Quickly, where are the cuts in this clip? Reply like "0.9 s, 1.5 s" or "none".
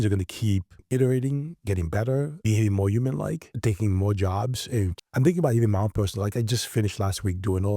0.8 s, 2.4 s, 3.5 s, 5.0 s